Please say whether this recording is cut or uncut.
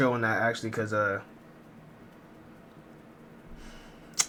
uncut